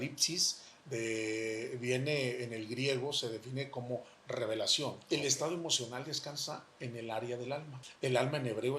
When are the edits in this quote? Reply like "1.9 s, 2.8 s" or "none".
5.0 s, 7.8 s